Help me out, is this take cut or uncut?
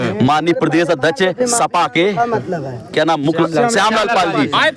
uncut